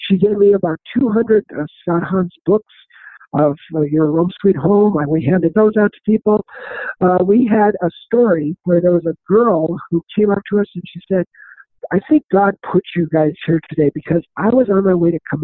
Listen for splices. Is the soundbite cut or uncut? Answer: uncut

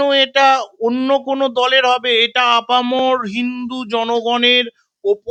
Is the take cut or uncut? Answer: uncut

